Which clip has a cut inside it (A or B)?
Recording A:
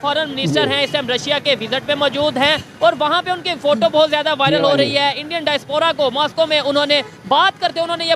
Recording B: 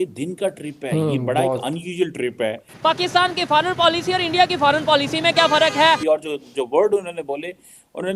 B